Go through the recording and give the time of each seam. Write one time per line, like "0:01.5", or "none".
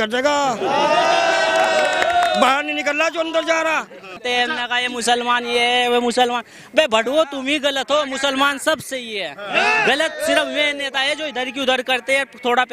0:04.2